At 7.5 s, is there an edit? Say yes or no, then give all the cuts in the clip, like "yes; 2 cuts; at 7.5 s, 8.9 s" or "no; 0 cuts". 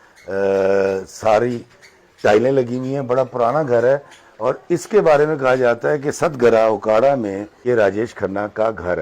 yes; 1 cut; at 7.5 s